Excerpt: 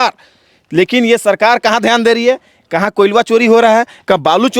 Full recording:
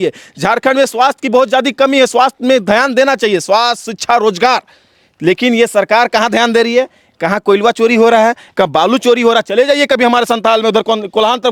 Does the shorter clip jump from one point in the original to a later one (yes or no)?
no